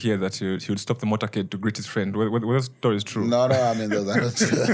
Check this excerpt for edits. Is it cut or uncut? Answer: uncut